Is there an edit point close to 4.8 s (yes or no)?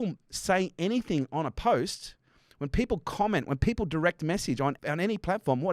yes